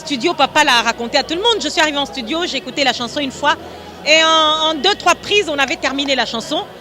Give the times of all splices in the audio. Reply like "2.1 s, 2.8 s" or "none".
none